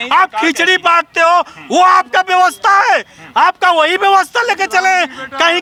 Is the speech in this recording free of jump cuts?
yes; 0 cuts

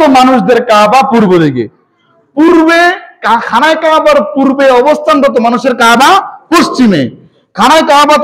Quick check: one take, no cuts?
yes; 0 cuts

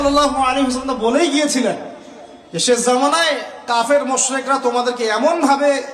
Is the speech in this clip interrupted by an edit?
no; 0 cuts

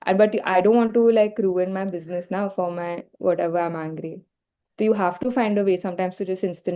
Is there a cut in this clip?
no; 0 cuts

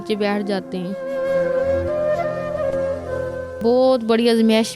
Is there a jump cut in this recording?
yes; 2 cuts; at 1.0 s, 3.5 s

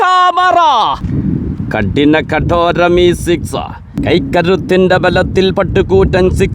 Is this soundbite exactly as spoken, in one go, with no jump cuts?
no; 2 cuts; at 1.0 s, 3.8 s

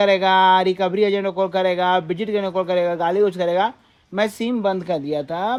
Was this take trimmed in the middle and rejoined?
no; 0 cuts

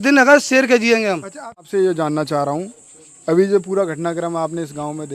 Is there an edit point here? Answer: yes; 1 cut; at 1.6 s

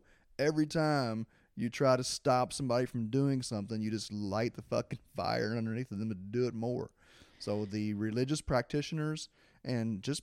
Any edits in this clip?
no; 0 cuts

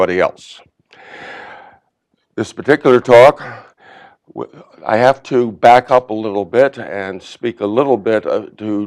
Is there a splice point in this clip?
no; 0 cuts

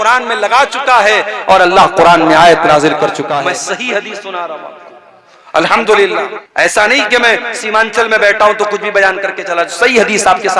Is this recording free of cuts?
no; 2 cuts; at 3.3 s, 6.4 s

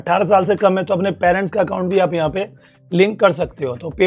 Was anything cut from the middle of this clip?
no; 0 cuts

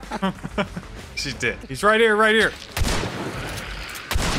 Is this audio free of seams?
no; 1 cut; at 1.7 s

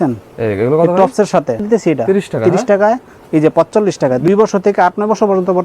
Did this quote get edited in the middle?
yes; 2 cuts; at 1.6 s, 4.2 s

